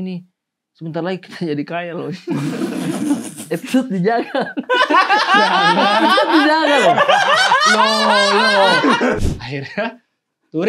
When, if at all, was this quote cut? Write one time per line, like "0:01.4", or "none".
0:09.2